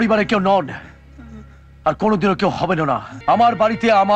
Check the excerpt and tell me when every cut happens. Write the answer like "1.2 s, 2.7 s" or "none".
3.1 s